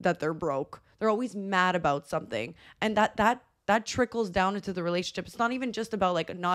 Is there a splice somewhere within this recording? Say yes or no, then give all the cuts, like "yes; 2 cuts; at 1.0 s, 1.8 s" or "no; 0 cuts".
no; 0 cuts